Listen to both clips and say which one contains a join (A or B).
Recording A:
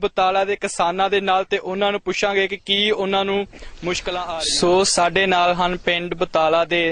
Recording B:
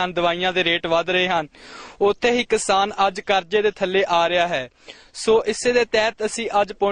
A